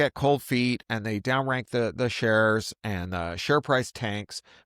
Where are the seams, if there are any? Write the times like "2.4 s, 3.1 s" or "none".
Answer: none